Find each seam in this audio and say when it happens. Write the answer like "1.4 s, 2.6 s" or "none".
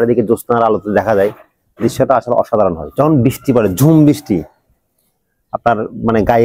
2.9 s